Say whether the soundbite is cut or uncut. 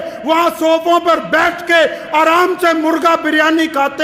uncut